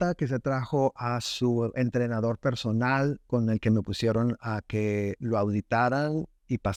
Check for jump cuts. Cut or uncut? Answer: uncut